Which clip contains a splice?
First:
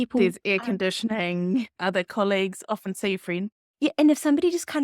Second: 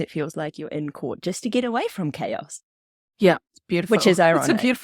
first; 2 cuts; at 1.7 s, 3.6 s

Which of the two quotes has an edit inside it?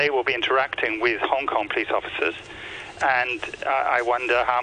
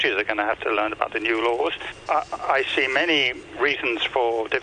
second; 2 cuts; at 2.0 s, 3.4 s

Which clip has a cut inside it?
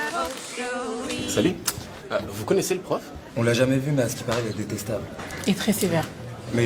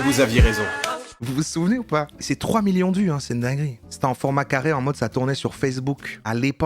second; 3 cuts; at 1.1 s, 2.1 s, 3.7 s

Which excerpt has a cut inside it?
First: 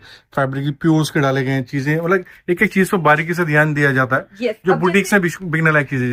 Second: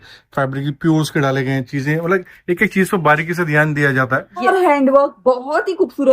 second; 1 cut; at 4.5 s

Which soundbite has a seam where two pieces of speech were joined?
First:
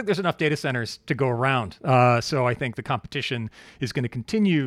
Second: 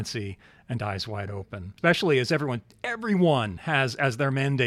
second; 1 cut; at 1.6 s

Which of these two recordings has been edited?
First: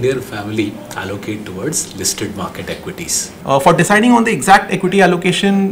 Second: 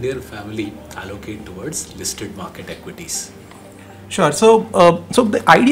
first; 1 cut; at 3.2 s

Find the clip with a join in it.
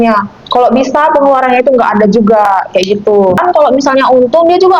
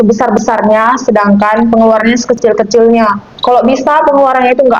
first; 1 cut; at 3.4 s

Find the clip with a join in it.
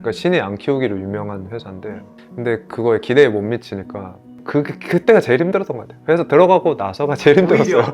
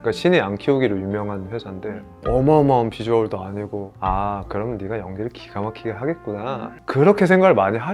first; 2 cuts; at 2.1 s, 4.4 s

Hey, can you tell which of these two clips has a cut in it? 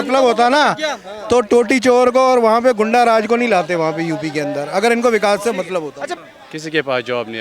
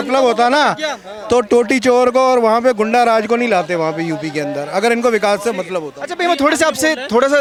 first; 1 cut; at 6.0 s

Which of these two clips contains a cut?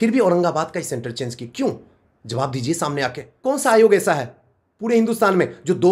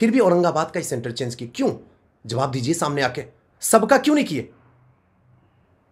first; 1 cut; at 3.3 s

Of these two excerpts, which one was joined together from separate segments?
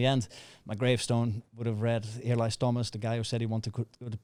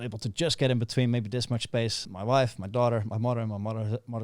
second; 1 cut; at 2.0 s

